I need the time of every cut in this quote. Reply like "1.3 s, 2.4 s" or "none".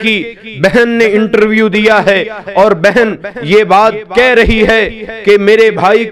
none